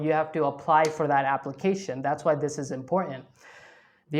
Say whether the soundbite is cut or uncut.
uncut